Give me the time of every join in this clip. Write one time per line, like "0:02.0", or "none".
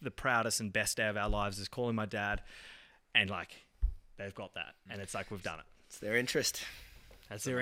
none